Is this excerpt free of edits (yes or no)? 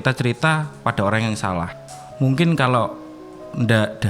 no